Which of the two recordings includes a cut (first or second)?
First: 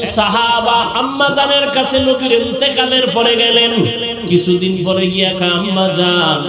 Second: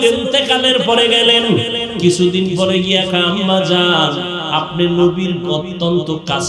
first